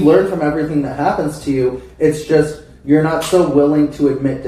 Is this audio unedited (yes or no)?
yes